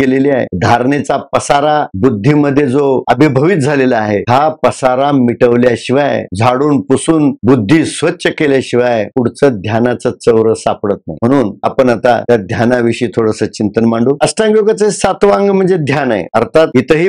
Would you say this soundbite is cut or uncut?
uncut